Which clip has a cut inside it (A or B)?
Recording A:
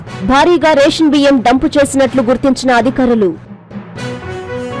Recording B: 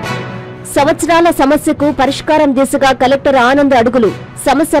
A